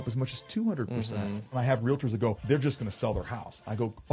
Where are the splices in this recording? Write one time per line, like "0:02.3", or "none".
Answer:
0:01.5
0:02.4